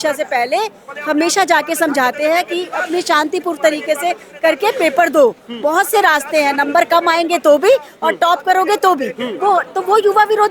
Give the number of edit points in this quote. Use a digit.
0